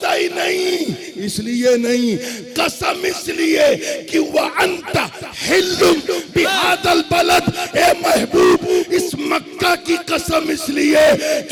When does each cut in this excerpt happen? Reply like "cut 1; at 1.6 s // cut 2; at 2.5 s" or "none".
none

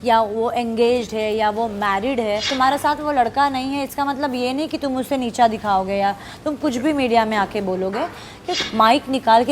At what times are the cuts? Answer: cut 1; at 2.5 s // cut 2; at 8.5 s

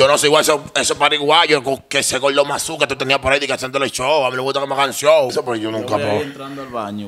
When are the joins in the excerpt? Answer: cut 1; at 5.3 s

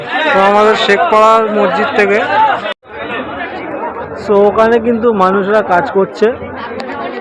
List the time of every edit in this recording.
cut 1; at 2.8 s

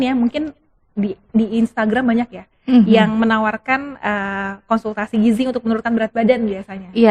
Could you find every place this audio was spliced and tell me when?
none

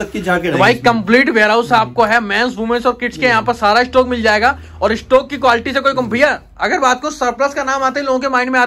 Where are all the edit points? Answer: none

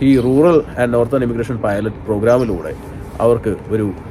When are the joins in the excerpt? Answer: none

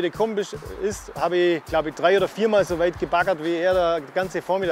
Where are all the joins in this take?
cut 1; at 1.6 s

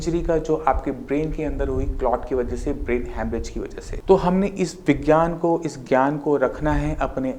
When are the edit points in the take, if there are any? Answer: cut 1; at 3.9 s

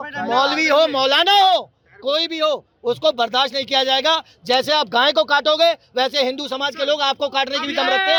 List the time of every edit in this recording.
none

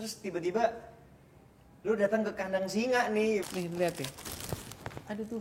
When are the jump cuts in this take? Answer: cut 1; at 3.4 s

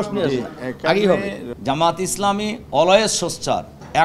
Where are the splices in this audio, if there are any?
cut 1; at 1.4 s

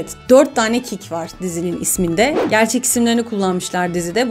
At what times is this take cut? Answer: cut 1; at 2.4 s

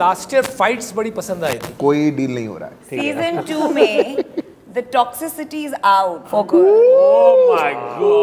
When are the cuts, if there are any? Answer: cut 1; at 1.7 s // cut 2; at 2.9 s // cut 3; at 6.2 s

